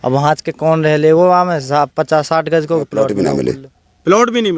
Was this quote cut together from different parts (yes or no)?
yes